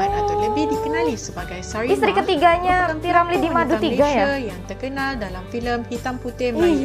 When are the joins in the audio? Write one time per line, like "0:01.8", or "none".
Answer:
none

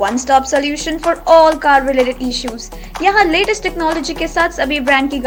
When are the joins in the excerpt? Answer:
none

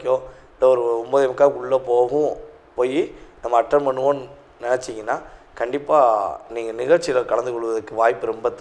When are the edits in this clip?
none

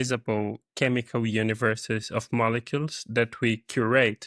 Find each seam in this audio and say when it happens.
none

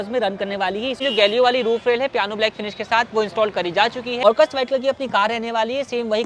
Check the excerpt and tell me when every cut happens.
0:01.0
0:04.2

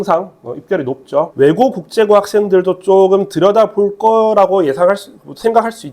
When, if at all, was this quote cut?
0:01.3

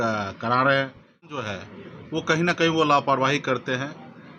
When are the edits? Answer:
0:01.3

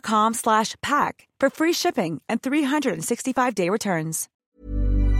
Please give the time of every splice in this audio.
0:04.2

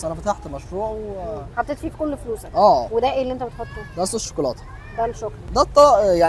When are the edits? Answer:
0:02.9
0:05.4

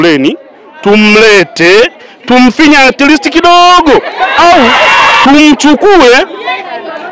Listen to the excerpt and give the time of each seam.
0:05.2

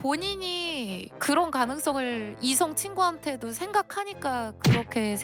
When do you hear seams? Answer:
none

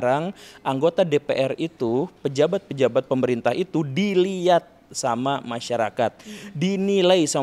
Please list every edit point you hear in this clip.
none

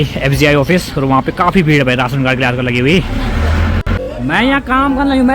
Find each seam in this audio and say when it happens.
0:03.9

